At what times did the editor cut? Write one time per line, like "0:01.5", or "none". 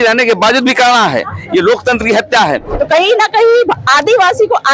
0:02.8